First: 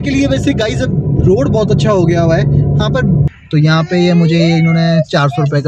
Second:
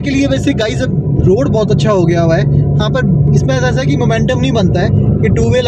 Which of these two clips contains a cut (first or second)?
first